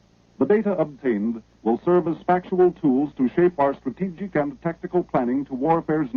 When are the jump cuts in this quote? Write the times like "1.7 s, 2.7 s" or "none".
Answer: 4.4 s